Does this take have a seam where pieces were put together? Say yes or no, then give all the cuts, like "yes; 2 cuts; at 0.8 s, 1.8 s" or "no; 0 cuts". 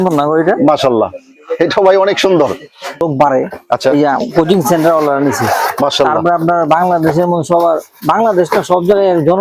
yes; 1 cut; at 3.0 s